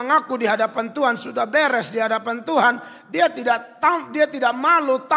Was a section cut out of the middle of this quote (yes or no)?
no